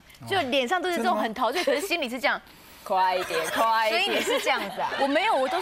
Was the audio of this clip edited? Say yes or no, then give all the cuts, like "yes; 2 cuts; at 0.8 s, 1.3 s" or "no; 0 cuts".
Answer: no; 0 cuts